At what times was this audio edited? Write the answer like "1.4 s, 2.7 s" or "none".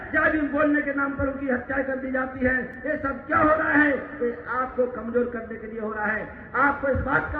none

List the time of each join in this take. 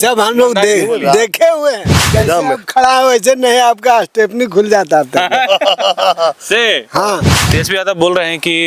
2.0 s, 7.3 s

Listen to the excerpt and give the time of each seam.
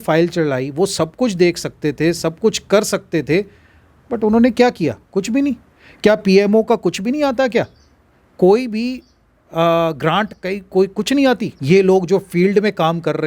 11.5 s

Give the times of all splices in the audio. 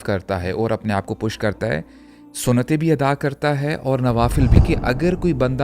4.6 s

